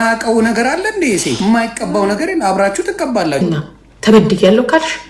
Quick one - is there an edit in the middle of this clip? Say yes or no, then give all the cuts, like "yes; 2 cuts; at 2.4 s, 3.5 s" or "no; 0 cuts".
yes; 1 cut; at 3.4 s